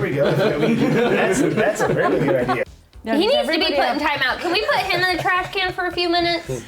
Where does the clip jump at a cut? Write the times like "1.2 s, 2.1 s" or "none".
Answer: 2.6 s